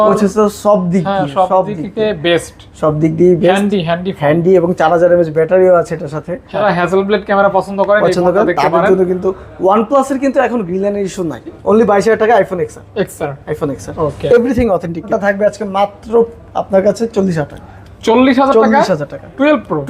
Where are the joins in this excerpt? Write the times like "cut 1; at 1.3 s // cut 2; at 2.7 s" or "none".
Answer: cut 1; at 6.6 s // cut 2; at 11.6 s // cut 3; at 15.1 s